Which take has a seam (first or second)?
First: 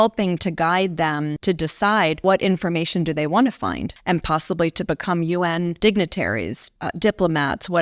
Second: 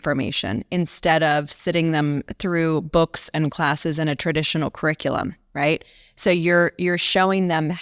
first